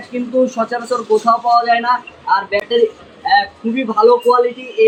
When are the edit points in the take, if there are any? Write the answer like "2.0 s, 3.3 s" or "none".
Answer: none